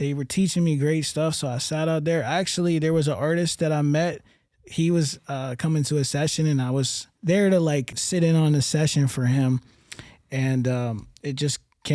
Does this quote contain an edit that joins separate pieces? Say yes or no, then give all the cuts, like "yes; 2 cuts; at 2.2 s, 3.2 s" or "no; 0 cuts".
yes; 2 cuts; at 7.0 s, 7.9 s